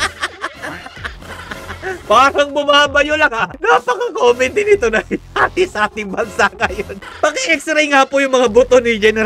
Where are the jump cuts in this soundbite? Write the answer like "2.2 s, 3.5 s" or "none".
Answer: 3.5 s, 7.0 s